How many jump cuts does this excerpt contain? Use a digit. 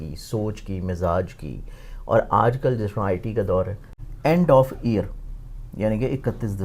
1